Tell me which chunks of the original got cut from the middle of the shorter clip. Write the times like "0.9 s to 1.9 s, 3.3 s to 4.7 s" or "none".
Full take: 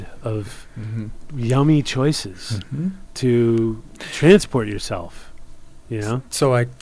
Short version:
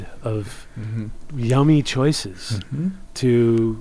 none